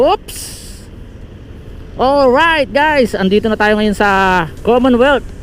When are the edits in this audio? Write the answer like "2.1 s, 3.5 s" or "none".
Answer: 4.5 s